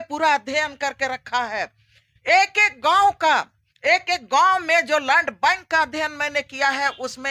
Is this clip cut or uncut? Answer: uncut